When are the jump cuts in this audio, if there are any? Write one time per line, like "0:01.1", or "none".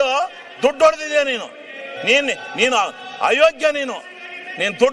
none